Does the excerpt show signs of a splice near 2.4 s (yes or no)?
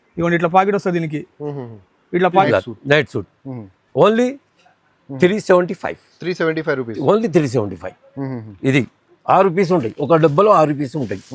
yes